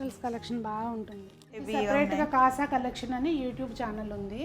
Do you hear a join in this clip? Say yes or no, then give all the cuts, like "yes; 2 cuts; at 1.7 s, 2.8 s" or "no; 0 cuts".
yes; 1 cut; at 1.7 s